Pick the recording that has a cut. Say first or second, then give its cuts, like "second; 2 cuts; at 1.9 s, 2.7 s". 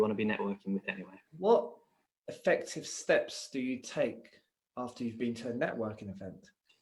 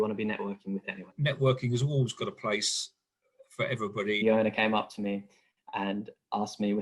second; 2 cuts; at 1.1 s, 4.2 s